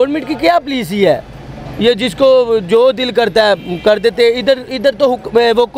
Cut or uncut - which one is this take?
uncut